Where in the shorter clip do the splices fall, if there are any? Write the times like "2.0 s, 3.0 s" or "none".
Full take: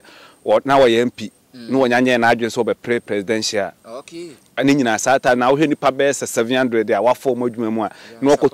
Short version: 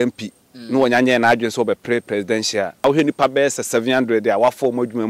2.8 s